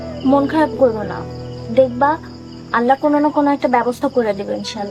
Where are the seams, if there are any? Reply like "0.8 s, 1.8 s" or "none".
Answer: none